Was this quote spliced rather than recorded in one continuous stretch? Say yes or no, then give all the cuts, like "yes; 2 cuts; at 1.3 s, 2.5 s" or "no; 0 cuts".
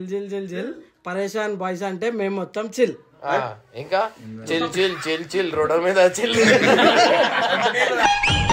no; 0 cuts